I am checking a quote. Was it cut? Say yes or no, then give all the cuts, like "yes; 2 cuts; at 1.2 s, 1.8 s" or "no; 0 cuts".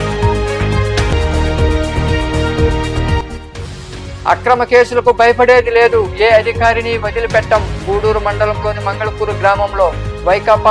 yes; 1 cut; at 1.1 s